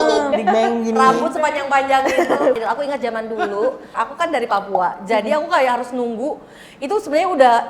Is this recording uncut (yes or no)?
no